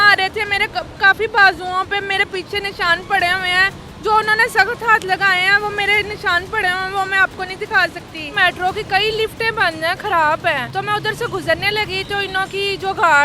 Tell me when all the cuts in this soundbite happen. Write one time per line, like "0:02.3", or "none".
0:08.3
0:10.7